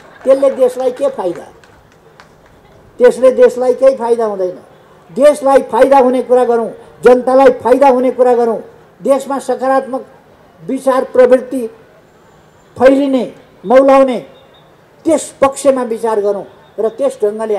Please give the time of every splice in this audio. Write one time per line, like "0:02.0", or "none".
none